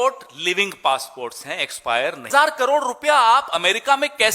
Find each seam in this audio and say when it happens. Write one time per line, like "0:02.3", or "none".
0:02.3